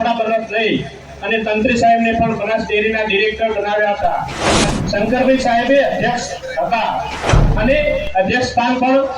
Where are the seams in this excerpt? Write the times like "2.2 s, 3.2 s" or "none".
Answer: 4.5 s

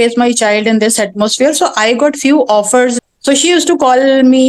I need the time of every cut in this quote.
2.9 s

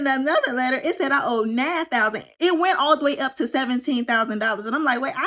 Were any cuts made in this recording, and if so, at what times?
2.2 s

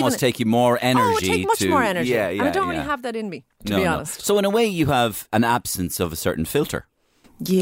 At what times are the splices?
5.3 s

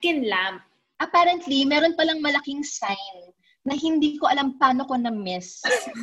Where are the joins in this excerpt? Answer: none

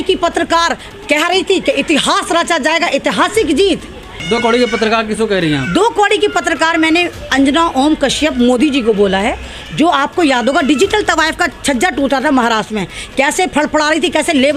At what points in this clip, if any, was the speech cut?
4.1 s

